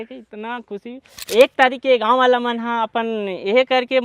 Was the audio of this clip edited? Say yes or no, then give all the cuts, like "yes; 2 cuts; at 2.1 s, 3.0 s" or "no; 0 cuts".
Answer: yes; 1 cut; at 1.1 s